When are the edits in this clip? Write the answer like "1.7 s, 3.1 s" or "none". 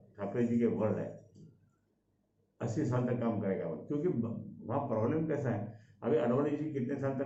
none